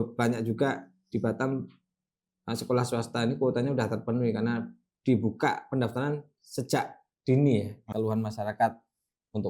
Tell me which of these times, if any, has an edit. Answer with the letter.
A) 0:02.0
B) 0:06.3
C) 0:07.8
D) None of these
C